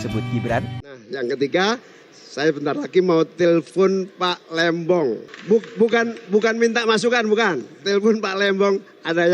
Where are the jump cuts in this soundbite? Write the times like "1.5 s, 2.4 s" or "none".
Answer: 1.0 s, 5.3 s